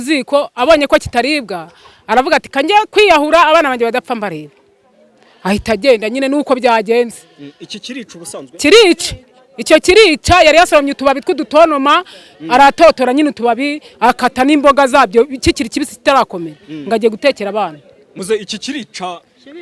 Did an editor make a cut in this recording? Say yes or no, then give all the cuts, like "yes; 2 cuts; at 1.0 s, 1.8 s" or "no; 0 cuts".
no; 0 cuts